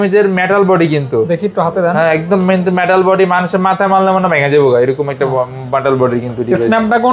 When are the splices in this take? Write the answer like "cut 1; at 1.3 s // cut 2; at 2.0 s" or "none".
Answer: none